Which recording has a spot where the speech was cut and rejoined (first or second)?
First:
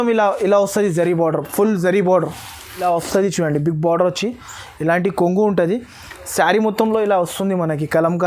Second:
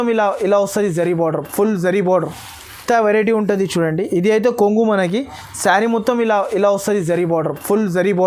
first